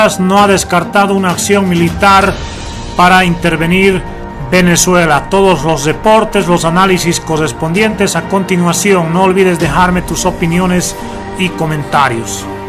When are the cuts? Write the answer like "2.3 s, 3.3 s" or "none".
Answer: none